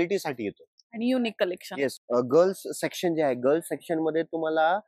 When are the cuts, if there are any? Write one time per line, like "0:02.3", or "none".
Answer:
0:02.0

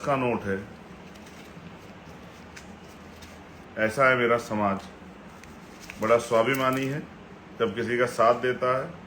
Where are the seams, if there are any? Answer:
0:03.6

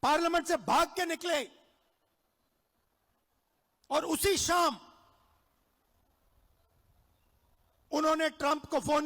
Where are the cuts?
none

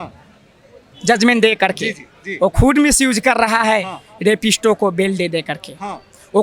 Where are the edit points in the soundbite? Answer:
none

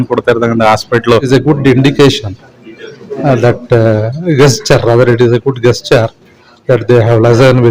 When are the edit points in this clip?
0:01.3

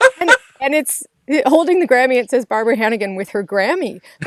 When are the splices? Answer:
none

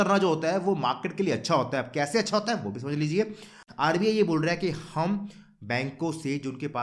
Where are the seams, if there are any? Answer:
0:03.6

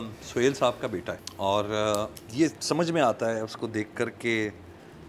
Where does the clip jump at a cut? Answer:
0:01.2
0:02.2

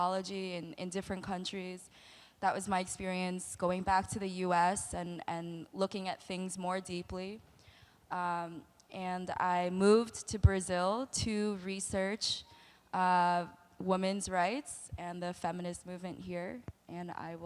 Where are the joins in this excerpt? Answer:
0:07.7

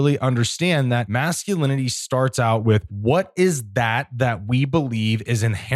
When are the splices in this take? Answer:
0:01.1
0:02.9

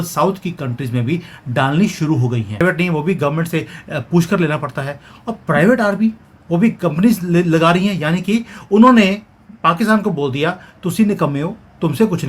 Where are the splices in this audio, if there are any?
0:02.6

